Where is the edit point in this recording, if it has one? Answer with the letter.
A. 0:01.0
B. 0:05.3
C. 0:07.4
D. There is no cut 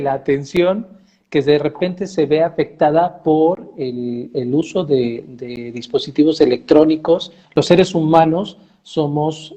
C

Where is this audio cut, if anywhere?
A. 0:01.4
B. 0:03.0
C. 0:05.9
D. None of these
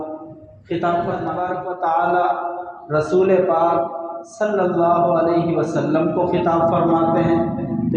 A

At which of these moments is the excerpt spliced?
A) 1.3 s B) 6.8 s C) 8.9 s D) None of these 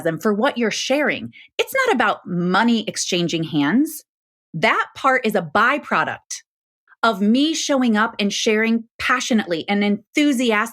A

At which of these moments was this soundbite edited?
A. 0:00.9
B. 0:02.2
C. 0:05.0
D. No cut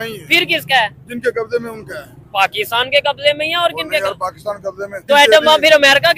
C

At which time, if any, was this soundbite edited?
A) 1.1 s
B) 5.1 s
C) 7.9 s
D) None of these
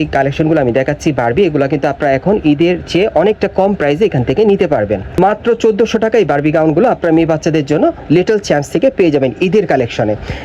B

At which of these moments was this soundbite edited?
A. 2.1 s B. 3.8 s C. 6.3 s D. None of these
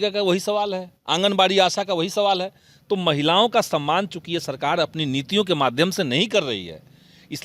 D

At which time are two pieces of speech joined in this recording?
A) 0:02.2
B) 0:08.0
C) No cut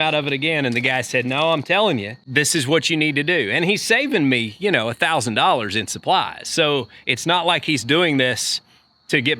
A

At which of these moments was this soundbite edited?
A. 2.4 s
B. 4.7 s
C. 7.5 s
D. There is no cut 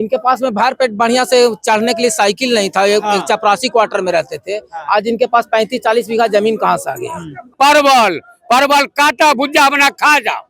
C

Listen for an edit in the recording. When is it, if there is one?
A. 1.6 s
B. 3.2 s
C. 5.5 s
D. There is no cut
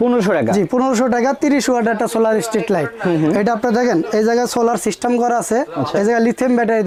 D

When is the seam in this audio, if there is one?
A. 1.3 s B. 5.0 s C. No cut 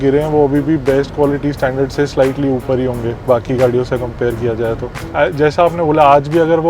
B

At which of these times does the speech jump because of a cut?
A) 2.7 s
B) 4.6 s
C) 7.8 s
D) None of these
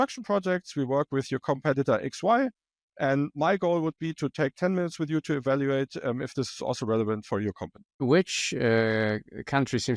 C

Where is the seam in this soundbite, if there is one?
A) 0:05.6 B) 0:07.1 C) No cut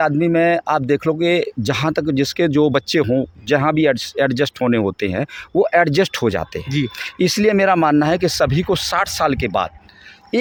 C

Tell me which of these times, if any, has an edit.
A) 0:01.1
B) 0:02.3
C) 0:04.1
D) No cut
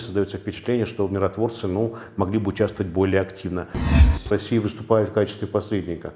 C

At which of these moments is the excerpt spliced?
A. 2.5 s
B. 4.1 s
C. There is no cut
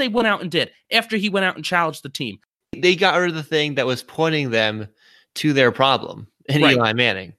A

